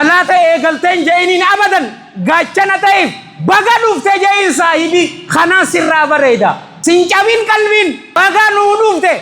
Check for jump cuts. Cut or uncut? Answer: cut